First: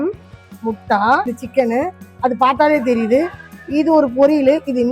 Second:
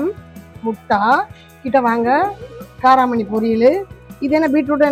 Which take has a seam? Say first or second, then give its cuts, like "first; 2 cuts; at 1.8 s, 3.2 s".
first; 1 cut; at 1.4 s